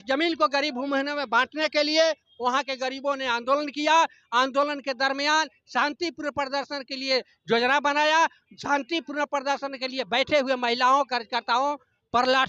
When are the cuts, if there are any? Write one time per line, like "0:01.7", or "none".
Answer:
none